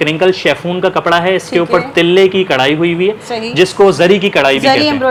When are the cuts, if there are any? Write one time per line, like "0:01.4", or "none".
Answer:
none